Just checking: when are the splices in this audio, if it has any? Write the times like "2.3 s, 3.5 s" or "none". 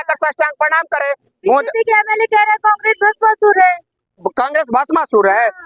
none